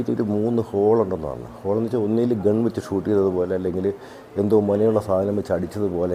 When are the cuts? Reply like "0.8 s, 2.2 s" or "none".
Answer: none